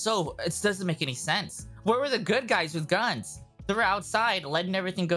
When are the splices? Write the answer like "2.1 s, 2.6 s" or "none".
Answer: none